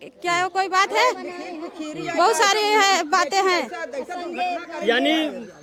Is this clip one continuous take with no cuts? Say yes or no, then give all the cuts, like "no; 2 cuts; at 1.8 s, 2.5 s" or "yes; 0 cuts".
yes; 0 cuts